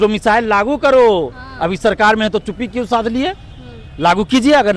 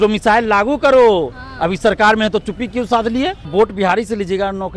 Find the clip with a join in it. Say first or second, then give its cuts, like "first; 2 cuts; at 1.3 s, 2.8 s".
second; 1 cut; at 3.4 s